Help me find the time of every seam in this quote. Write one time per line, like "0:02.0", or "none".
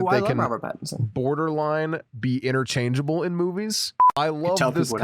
0:04.1

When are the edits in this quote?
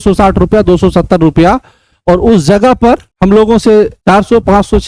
0:03.1
0:04.0

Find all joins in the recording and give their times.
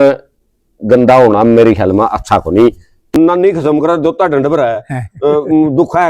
0:03.1

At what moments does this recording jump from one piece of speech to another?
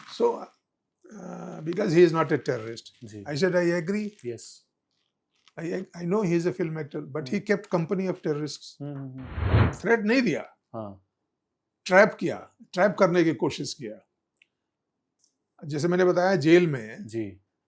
0:09.7

